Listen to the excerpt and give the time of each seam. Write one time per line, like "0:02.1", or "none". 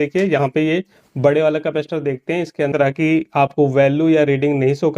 0:02.7